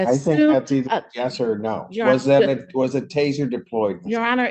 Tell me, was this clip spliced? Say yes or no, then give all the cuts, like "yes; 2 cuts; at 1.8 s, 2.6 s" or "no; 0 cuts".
no; 0 cuts